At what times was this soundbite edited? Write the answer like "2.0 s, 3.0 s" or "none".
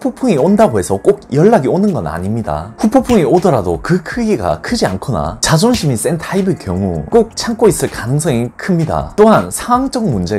none